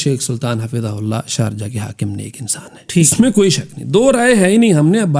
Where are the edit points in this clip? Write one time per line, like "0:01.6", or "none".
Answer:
none

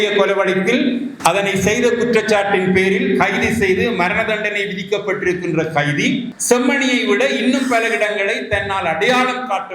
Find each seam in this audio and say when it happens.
0:01.1
0:06.3

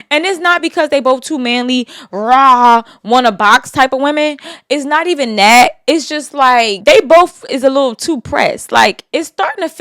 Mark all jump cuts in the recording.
0:06.7

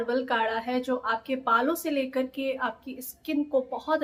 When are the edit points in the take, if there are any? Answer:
none

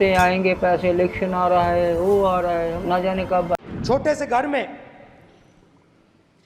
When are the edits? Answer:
0:03.5

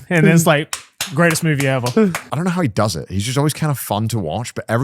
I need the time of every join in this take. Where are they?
0:02.2

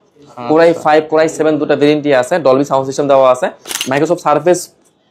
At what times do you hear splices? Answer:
0:03.7

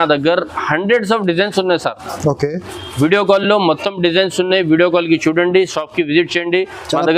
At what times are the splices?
none

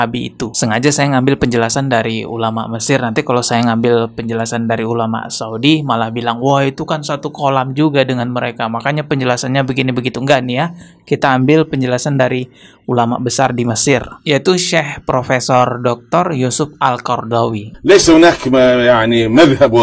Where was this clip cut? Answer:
0:17.7

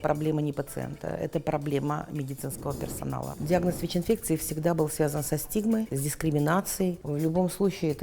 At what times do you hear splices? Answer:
0:03.3
0:05.9
0:07.0

